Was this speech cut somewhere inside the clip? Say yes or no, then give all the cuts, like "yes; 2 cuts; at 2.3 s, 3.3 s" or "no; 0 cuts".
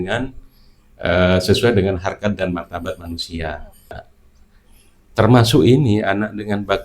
yes; 1 cut; at 4.0 s